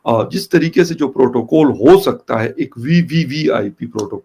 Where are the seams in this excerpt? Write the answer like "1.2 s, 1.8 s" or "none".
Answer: none

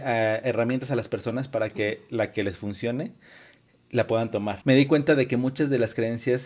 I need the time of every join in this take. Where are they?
4.5 s

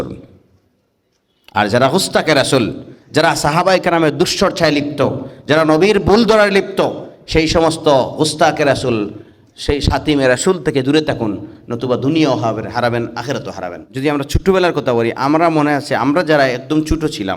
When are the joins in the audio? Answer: 13.8 s

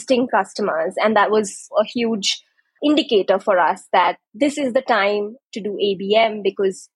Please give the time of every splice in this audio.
1.7 s, 2.8 s

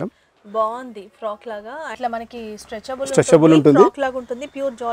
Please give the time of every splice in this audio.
2.0 s

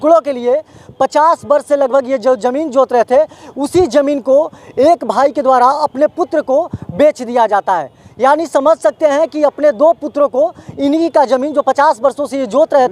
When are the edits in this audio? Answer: none

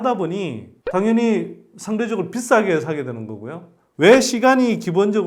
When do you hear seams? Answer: 3.8 s

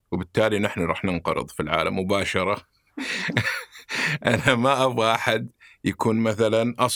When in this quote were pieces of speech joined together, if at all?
none

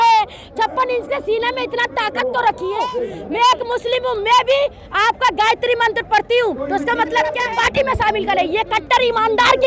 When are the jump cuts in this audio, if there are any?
2.8 s, 7.4 s

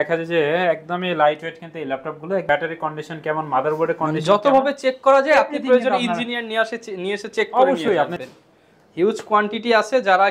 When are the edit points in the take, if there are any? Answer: 2.4 s, 8.2 s

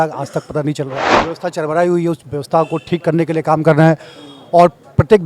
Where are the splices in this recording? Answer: 1.1 s

